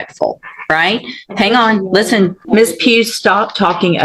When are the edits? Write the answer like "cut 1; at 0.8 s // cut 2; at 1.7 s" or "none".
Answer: cut 1; at 2.4 s